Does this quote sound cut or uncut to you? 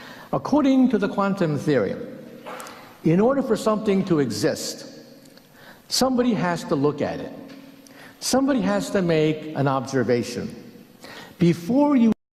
uncut